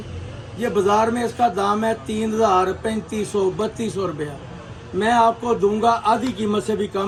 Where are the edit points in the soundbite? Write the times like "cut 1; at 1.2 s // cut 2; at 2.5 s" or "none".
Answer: none